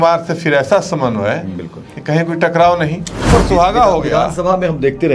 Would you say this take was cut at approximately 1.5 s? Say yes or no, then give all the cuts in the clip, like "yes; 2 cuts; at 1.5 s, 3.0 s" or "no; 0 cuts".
no; 1 cut; at 3.3 s